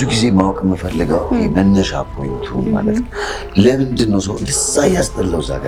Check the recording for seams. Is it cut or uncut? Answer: uncut